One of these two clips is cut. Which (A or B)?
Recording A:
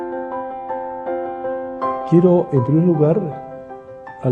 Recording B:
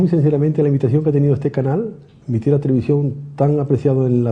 B